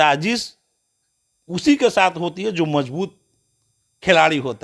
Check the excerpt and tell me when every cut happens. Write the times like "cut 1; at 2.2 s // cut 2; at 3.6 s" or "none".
none